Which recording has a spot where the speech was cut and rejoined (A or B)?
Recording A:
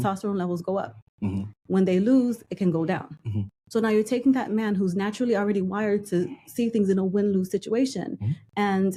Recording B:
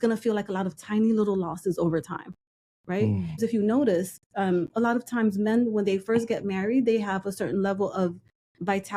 B